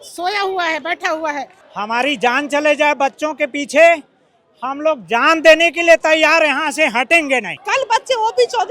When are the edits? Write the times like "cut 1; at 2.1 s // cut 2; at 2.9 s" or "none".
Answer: cut 1; at 1.6 s // cut 2; at 7.5 s